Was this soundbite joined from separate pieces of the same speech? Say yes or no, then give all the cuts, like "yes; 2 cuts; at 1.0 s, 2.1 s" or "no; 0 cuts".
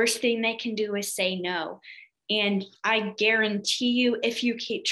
no; 0 cuts